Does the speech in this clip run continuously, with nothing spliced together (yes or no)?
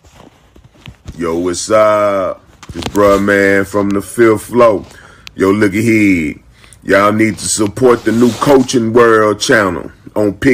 yes